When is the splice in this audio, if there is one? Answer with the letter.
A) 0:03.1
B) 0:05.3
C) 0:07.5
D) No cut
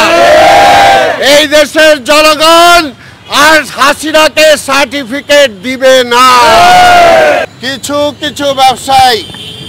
C